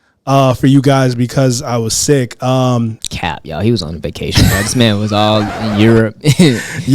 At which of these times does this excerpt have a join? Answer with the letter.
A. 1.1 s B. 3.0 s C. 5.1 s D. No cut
B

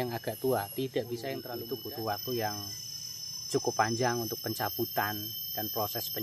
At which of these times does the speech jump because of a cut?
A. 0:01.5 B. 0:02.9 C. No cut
A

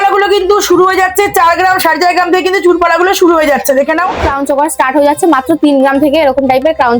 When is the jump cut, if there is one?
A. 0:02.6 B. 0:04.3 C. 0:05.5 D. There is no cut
B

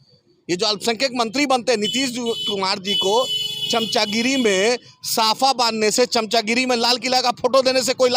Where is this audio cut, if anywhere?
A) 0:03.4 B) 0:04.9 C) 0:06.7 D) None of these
D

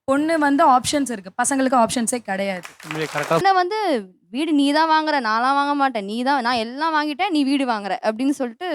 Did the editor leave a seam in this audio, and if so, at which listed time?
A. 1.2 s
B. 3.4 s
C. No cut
B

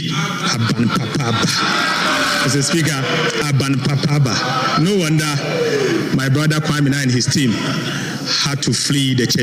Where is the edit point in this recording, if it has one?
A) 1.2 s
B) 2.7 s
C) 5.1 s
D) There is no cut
D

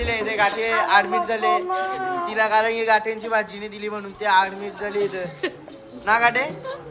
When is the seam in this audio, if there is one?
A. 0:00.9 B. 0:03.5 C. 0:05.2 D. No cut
D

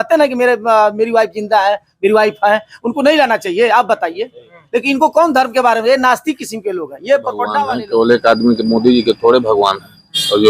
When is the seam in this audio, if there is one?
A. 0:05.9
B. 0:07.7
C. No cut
B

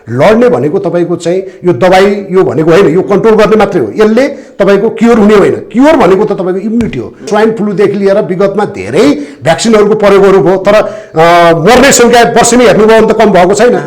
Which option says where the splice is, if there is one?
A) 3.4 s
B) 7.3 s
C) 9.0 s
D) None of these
B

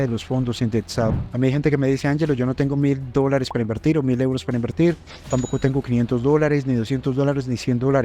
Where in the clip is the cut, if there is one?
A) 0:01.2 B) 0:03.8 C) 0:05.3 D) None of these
A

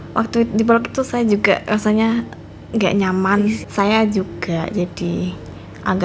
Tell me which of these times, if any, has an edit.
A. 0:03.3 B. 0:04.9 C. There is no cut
A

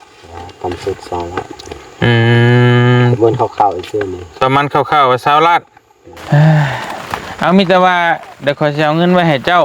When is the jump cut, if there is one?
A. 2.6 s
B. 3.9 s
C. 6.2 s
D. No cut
C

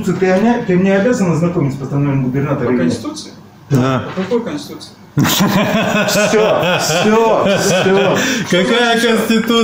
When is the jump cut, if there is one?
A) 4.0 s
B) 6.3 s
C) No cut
C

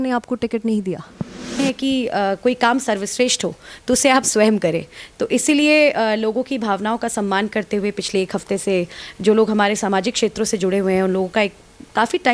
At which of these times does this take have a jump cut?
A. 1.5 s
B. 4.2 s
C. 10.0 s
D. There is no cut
A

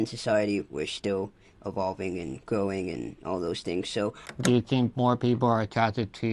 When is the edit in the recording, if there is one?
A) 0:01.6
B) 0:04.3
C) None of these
B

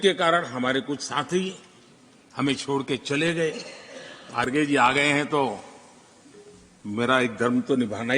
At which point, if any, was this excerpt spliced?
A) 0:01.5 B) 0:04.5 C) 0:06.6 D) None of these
B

